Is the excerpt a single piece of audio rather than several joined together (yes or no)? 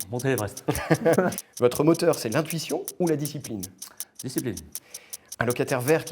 no